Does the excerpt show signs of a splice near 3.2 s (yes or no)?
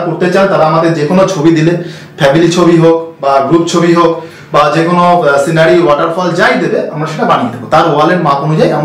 no